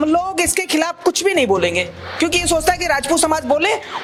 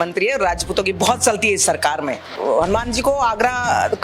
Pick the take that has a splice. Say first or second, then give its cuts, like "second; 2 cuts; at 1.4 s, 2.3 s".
second; 1 cut; at 2.3 s